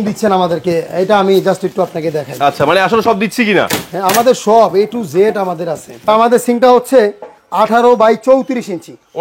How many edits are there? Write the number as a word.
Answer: one